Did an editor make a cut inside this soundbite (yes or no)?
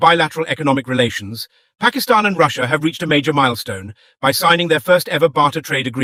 no